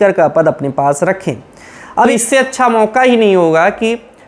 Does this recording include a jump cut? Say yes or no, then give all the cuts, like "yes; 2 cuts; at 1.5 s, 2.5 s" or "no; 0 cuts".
yes; 1 cut; at 1.8 s